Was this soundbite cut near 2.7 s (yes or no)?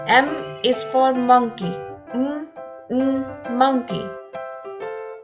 no